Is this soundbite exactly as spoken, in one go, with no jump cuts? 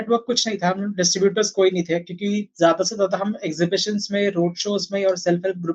yes; 0 cuts

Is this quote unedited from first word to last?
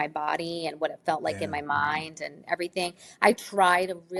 yes; 0 cuts

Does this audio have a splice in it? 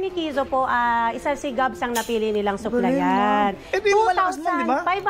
no; 0 cuts

